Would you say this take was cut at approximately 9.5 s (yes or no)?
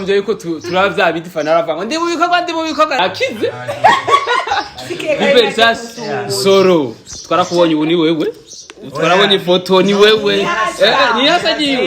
no